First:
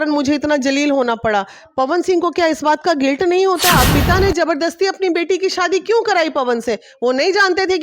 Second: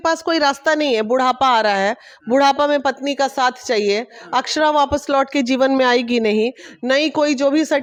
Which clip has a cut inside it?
first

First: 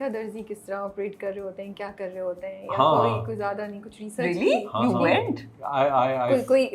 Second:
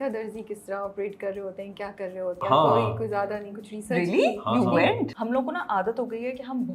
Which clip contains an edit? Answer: second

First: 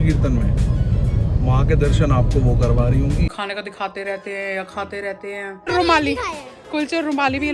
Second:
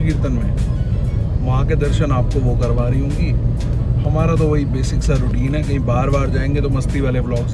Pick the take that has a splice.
first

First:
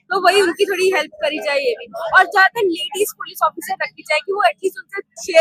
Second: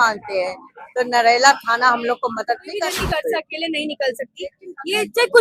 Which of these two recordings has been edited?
second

